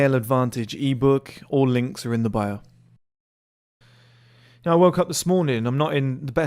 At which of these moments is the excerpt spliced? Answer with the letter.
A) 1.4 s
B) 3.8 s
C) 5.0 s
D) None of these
B